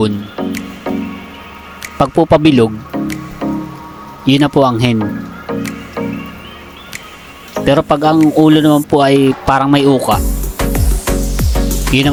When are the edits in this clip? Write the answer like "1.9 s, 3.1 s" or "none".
none